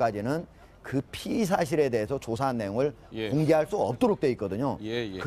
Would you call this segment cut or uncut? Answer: cut